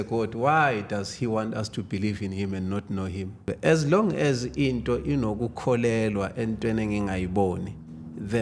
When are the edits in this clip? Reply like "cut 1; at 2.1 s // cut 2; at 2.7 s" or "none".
cut 1; at 3.5 s

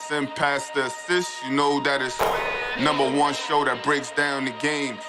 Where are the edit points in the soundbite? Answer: none

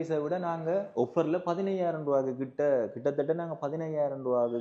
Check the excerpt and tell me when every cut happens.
none

